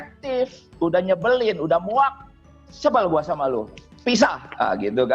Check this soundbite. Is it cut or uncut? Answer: uncut